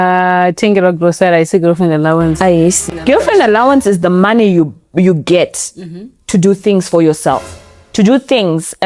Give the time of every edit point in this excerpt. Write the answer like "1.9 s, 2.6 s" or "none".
2.8 s